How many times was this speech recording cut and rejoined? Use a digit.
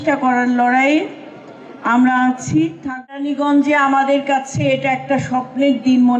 1